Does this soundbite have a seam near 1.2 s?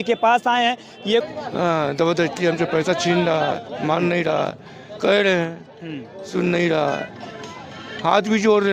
yes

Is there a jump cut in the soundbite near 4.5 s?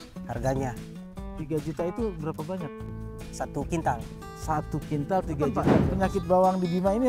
no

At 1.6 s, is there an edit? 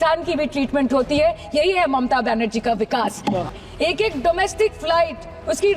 no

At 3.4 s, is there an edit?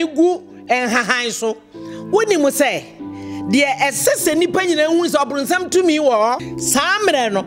no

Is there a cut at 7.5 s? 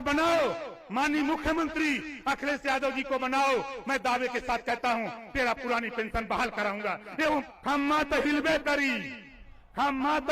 yes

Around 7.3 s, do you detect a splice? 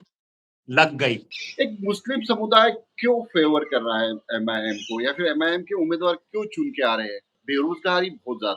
yes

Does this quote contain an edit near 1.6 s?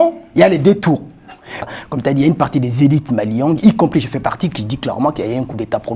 yes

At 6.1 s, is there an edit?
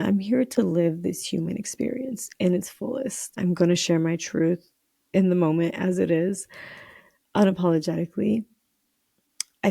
no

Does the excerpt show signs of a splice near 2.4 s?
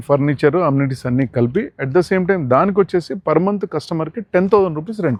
no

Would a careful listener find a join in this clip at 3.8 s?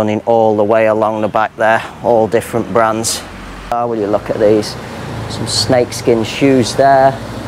yes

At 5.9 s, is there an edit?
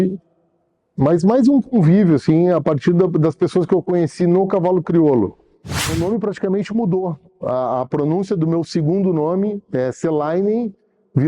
yes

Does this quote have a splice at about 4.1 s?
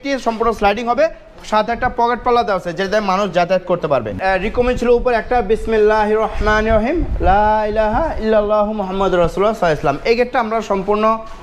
yes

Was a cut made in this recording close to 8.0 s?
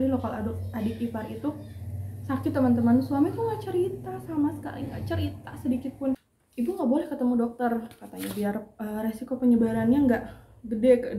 no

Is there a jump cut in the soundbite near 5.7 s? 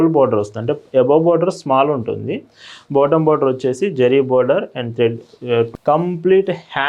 yes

